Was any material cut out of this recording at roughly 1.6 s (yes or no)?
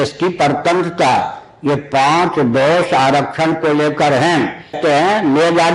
no